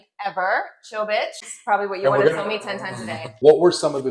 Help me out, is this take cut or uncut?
cut